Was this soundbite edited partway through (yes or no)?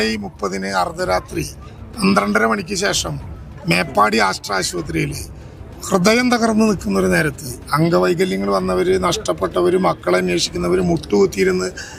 no